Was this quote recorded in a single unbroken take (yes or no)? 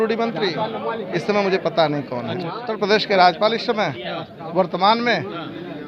no